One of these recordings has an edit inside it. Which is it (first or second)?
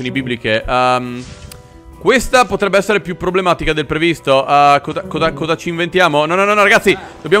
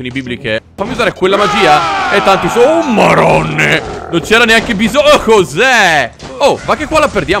second